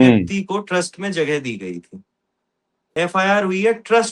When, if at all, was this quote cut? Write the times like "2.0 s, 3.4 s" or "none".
2.8 s